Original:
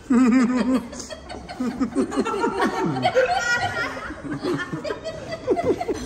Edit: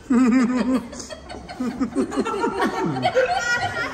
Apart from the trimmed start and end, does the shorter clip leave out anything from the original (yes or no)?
no